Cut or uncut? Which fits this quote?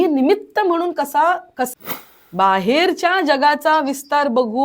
cut